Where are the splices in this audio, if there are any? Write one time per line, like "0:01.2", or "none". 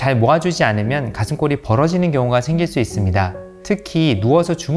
none